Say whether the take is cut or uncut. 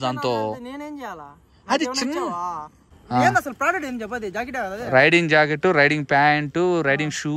cut